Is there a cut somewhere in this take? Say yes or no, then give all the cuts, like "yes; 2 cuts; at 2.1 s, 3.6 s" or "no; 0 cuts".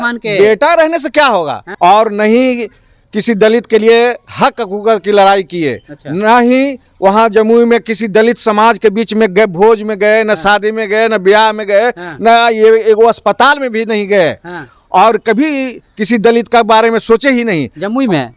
yes; 1 cut; at 1.6 s